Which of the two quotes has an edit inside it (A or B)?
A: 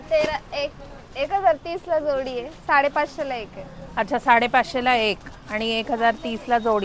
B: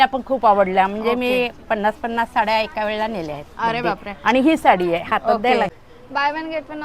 B